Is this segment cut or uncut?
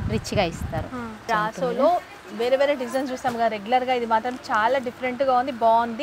cut